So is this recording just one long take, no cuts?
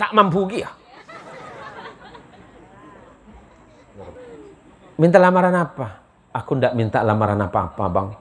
no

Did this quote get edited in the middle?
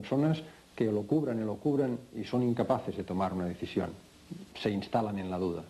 no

